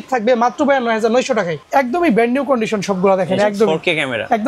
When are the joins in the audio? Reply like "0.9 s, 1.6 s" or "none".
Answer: 1.6 s